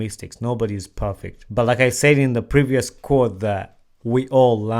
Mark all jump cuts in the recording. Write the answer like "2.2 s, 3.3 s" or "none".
1.3 s